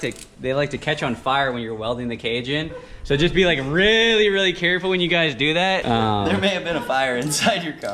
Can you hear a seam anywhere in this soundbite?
yes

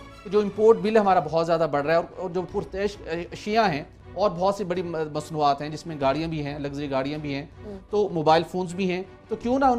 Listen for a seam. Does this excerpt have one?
no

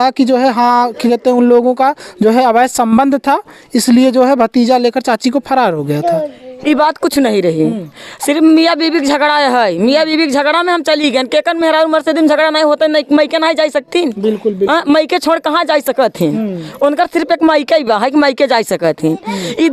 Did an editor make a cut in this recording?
no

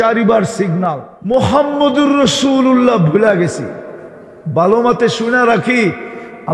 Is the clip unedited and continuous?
no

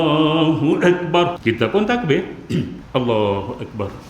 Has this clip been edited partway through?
yes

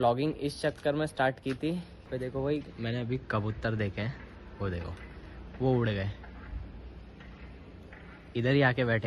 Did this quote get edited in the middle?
yes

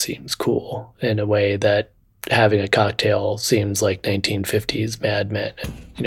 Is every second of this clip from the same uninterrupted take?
yes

